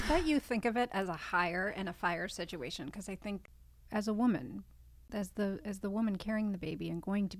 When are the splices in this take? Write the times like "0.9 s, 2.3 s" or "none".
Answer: 3.5 s, 5.0 s

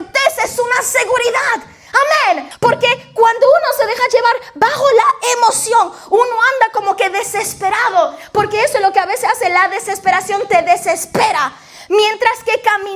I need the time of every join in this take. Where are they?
2.5 s

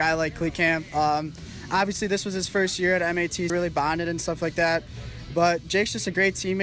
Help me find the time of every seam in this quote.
3.5 s

